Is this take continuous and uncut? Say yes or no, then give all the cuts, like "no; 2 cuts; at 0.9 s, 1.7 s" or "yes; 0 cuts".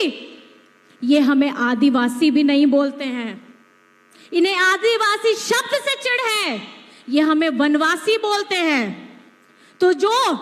yes; 0 cuts